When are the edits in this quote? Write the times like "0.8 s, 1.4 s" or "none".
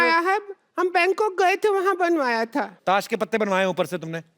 2.7 s

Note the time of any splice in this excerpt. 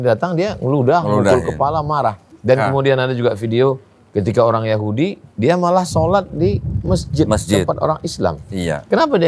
2.3 s

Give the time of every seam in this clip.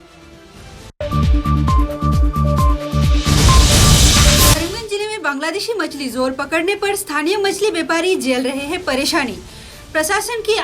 4.5 s

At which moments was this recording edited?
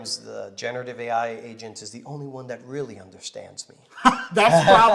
none

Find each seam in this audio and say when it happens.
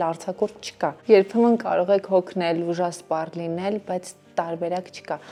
none

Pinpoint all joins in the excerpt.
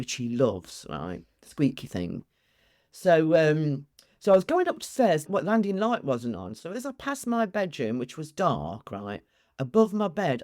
5.3 s

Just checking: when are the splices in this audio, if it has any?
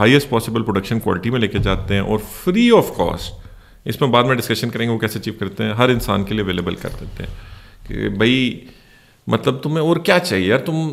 none

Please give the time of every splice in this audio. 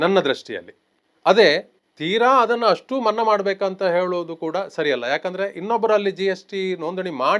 none

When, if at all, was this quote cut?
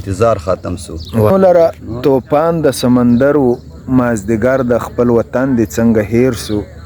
1.3 s

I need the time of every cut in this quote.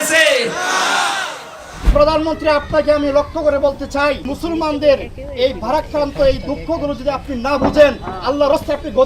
1.9 s, 4.3 s

